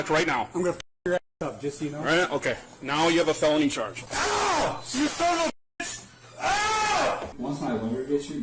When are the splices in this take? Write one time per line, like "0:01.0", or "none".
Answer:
0:04.0
0:07.3